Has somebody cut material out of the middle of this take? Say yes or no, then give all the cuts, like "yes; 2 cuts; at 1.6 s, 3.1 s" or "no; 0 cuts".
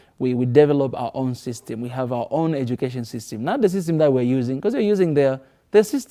no; 0 cuts